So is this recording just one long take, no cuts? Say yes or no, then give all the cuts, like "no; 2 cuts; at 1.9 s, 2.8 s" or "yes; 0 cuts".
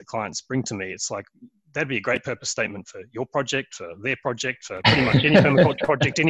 yes; 0 cuts